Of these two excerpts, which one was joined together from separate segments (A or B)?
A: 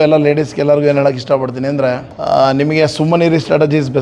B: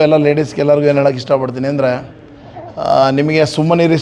A